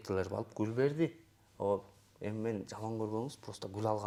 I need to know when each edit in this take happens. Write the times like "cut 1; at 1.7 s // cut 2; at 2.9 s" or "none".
none